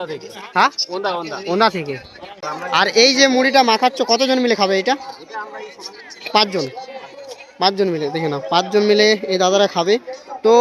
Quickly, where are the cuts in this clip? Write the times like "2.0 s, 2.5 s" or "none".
2.3 s